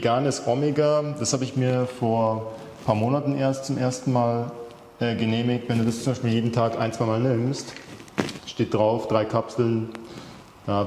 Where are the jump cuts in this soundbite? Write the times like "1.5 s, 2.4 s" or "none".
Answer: none